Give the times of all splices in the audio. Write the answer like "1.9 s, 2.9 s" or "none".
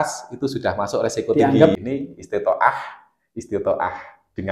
1.7 s